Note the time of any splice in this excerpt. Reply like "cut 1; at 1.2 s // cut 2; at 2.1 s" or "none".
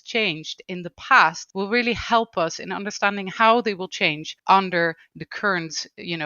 cut 1; at 1.4 s // cut 2; at 4.3 s